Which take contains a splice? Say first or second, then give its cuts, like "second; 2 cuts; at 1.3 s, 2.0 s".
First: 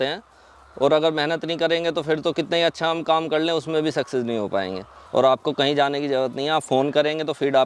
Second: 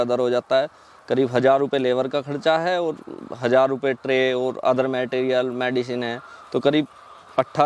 first; 1 cut; at 4.9 s